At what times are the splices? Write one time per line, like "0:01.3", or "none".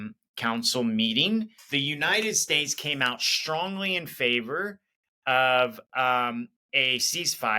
0:01.6
0:06.6